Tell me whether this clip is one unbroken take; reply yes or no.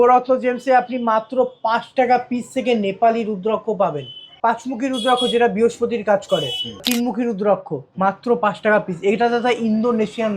no